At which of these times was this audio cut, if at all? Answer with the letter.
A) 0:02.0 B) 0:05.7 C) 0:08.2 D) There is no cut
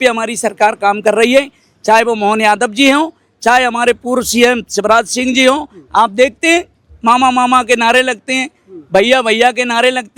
D